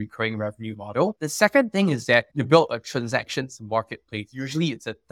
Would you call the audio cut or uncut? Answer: uncut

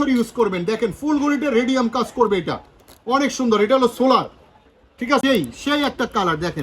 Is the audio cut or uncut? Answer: cut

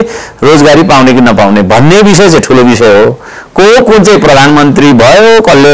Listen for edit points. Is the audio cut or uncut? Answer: uncut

